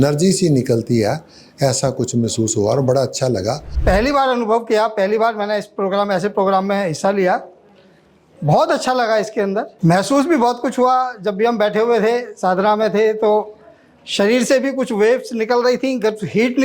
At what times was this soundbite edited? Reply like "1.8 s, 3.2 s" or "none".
3.7 s, 9.7 s